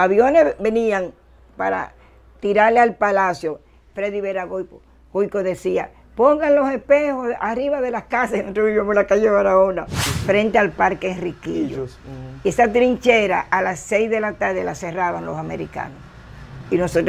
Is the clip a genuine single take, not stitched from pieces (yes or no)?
no